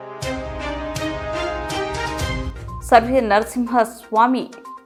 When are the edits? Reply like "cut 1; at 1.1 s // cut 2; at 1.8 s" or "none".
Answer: none